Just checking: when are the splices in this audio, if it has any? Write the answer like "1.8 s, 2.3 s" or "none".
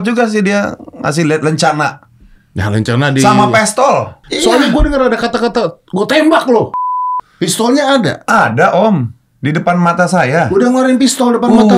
4.3 s, 6.8 s